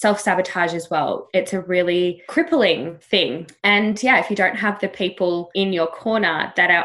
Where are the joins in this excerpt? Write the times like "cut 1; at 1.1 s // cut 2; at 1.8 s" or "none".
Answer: cut 1; at 1.2 s // cut 2; at 5.5 s